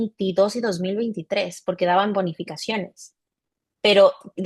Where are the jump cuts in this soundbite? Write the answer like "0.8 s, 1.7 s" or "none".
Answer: none